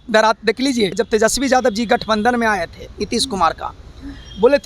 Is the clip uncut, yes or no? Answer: no